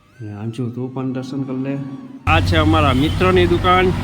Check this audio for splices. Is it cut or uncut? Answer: cut